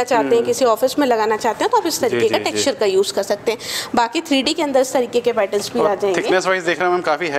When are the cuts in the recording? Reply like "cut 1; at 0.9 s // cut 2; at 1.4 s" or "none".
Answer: none